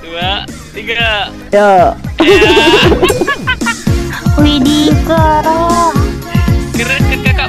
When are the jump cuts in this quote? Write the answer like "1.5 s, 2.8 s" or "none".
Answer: none